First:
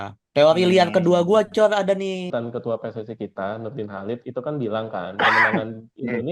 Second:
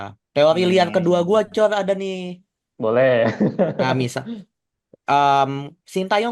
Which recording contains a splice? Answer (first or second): first